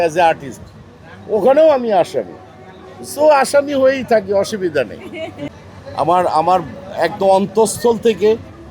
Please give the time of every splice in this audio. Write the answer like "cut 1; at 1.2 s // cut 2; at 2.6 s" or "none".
cut 1; at 5.4 s